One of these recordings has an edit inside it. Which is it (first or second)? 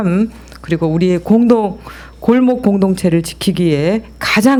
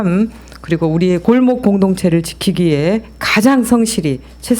second